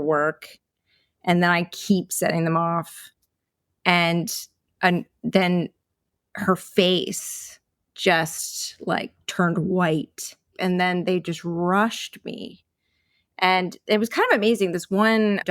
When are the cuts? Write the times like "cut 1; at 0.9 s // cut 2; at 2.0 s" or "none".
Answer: cut 1; at 10.5 s